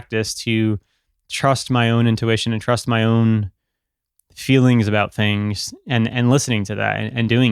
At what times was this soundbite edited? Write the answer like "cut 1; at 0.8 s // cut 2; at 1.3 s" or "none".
none